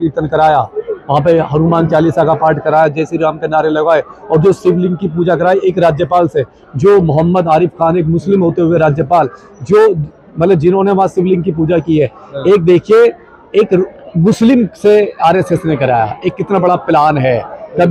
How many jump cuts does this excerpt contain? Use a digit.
0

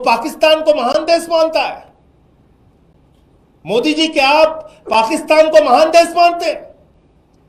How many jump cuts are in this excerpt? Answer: 0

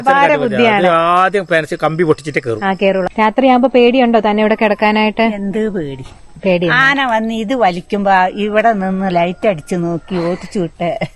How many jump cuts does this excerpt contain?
1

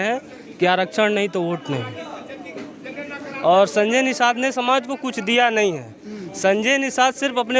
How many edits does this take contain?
0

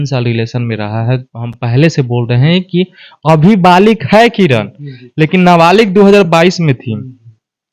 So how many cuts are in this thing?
0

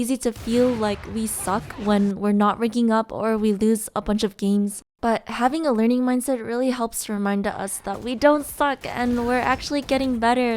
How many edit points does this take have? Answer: 1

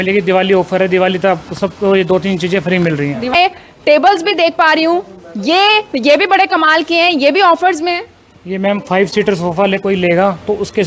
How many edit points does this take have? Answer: 1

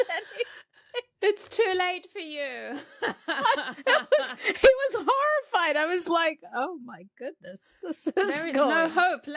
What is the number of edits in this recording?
0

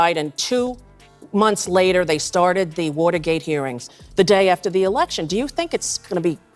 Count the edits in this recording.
1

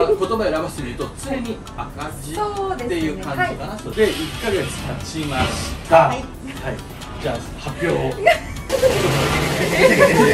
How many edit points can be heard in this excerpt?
1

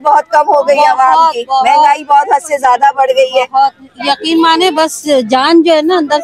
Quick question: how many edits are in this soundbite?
0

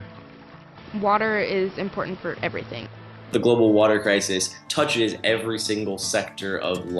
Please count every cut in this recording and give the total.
1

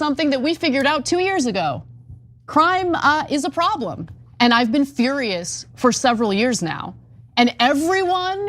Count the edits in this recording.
1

